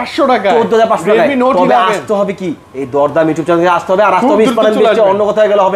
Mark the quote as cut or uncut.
uncut